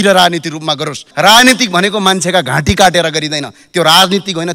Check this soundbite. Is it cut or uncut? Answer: cut